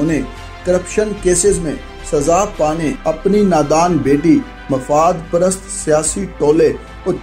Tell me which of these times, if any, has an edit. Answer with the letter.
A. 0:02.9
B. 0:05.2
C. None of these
A